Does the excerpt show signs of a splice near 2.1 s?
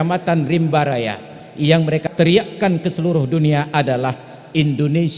yes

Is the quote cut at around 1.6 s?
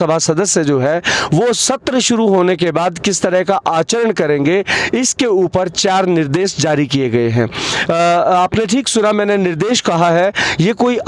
no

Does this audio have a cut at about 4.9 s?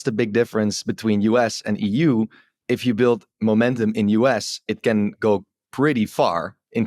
no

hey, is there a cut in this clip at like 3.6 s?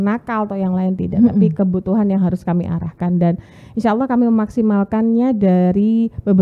no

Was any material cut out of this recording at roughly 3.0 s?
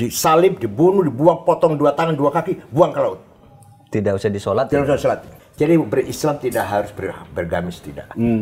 no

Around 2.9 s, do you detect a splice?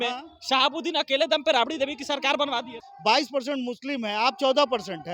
yes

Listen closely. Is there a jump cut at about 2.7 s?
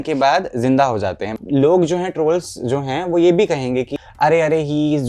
no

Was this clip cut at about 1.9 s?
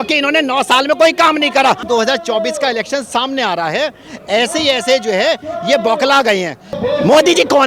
yes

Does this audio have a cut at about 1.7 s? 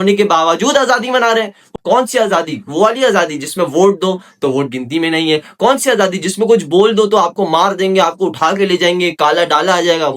yes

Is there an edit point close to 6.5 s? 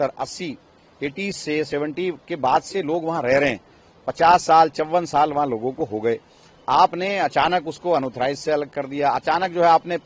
no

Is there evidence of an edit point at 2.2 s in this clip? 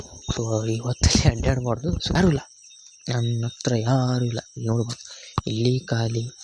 yes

